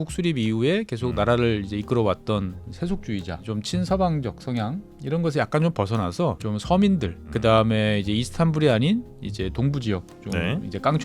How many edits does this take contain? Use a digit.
4